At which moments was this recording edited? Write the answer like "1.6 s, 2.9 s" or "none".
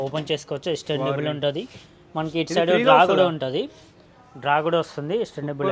none